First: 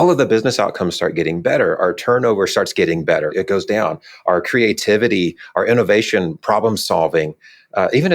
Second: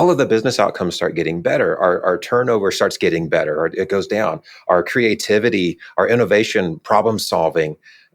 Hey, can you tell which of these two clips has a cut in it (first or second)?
first